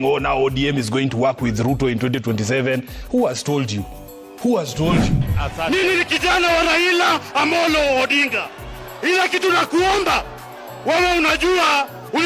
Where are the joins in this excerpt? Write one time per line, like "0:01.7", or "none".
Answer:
0:05.2